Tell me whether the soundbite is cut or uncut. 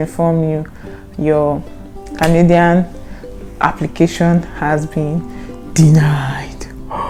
uncut